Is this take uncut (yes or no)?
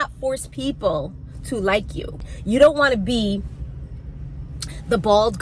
no